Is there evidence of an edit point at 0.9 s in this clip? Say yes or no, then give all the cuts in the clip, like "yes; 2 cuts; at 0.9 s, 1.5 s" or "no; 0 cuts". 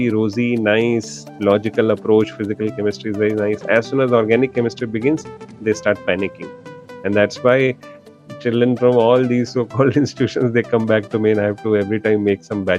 no; 0 cuts